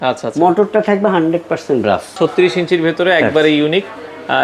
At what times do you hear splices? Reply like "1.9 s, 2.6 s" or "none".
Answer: 2.1 s